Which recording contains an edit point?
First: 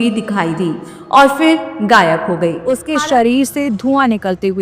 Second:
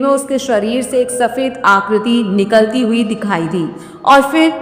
first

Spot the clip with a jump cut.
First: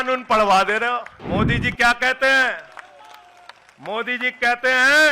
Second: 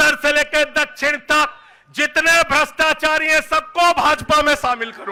first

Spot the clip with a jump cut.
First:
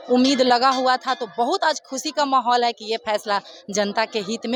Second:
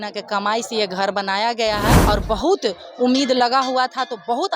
second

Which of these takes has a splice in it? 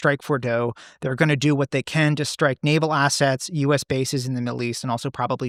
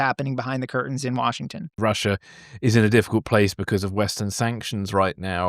second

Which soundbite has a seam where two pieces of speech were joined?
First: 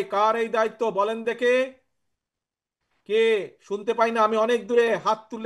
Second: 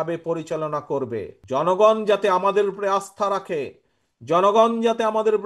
second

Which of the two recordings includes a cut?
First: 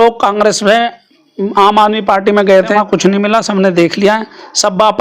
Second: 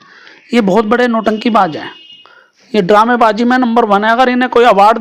first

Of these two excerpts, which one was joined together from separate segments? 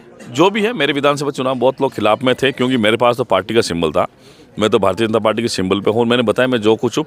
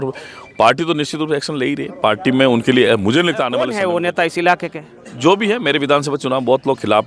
second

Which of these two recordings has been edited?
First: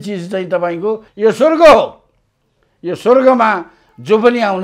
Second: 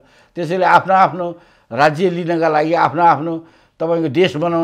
first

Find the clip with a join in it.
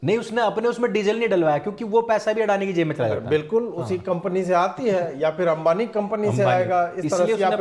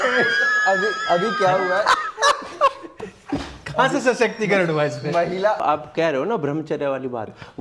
second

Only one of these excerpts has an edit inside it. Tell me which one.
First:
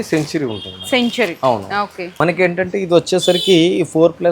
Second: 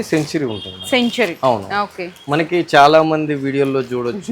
first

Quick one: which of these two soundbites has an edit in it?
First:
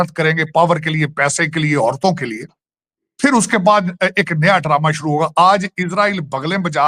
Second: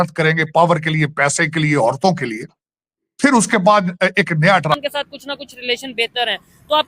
second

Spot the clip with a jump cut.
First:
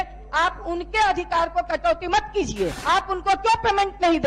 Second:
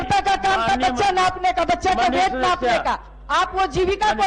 first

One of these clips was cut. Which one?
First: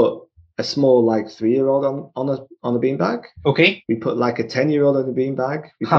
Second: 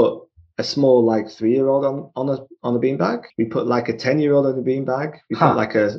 second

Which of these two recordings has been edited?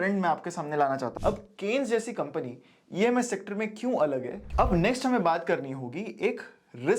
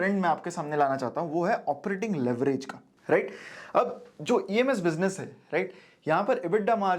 first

